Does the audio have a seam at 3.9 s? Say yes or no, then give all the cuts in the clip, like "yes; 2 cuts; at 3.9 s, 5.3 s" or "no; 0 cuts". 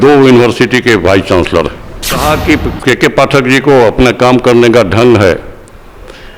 no; 1 cut; at 2.2 s